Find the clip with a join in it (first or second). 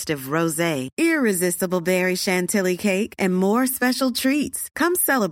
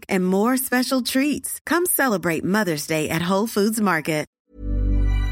second